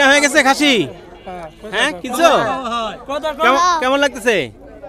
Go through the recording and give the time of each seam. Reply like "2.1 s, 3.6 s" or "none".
none